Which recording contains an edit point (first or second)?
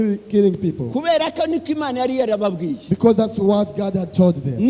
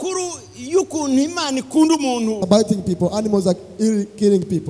second